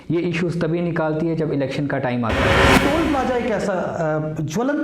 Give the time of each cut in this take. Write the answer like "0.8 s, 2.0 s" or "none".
2.7 s